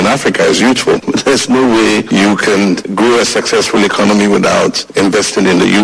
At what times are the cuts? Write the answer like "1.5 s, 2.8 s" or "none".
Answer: 1.0 s, 4.8 s